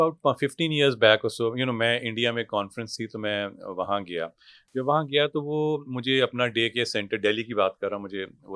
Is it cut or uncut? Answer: uncut